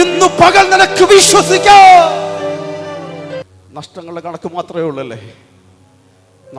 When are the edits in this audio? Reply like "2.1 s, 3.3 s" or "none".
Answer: 3.5 s